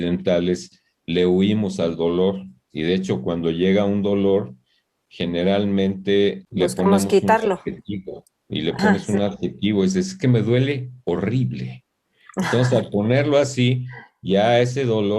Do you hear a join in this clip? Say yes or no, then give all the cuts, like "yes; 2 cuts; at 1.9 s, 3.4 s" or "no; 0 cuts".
yes; 1 cut; at 6.4 s